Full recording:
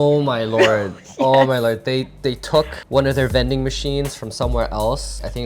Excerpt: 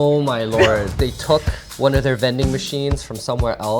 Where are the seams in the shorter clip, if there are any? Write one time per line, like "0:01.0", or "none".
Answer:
0:01.2